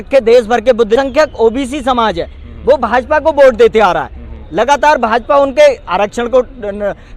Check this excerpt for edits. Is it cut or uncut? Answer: cut